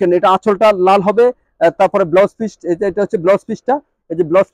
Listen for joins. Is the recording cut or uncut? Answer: uncut